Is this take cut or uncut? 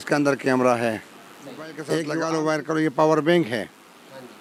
cut